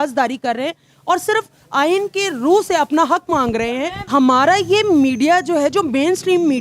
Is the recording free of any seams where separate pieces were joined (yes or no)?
no